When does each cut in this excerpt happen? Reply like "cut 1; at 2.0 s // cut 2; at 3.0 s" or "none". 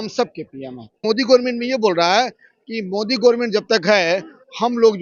cut 1; at 1.0 s